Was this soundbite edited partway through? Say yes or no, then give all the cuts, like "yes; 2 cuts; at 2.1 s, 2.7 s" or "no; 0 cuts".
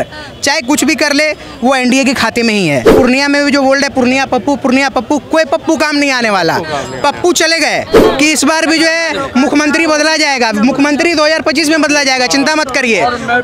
yes; 2 cuts; at 2.9 s, 8.0 s